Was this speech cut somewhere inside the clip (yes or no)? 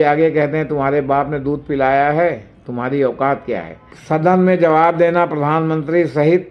yes